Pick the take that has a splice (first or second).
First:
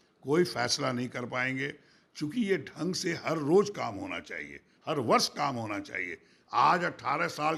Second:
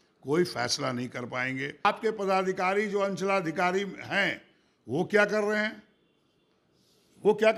second